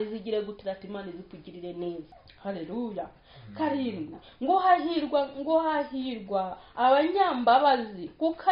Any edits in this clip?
yes; 1 cut; at 2.1 s

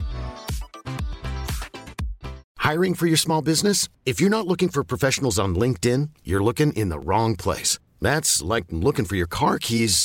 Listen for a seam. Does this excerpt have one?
no; 0 cuts

